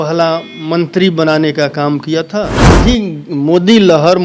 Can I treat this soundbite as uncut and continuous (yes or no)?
no